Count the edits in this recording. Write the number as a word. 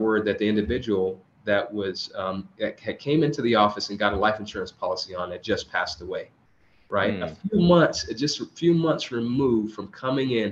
zero